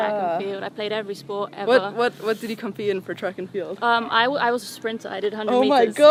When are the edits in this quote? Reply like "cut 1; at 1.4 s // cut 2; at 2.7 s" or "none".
none